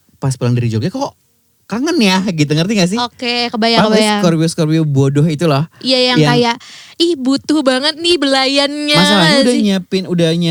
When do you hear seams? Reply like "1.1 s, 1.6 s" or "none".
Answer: none